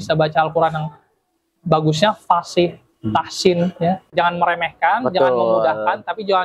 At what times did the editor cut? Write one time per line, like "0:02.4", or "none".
0:04.1